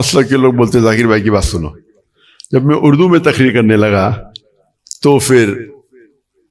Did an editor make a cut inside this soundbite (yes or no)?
no